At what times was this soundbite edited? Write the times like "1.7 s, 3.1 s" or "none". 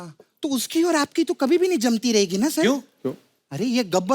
none